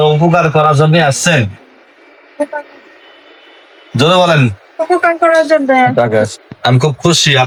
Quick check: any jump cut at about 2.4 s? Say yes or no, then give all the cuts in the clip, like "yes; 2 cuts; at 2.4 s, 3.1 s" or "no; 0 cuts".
no; 0 cuts